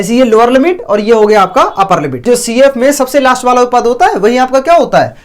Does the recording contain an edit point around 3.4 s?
no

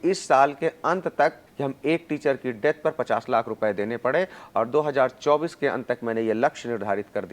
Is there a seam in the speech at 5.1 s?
no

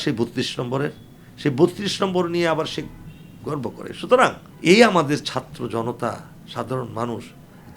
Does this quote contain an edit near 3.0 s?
no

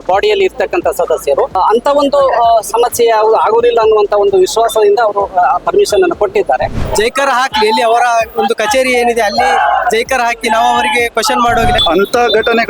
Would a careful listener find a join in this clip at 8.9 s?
no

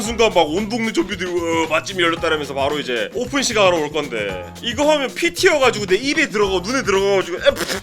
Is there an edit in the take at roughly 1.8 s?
no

